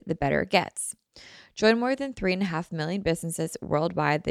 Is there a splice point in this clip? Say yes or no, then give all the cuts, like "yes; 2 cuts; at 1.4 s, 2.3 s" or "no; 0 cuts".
no; 0 cuts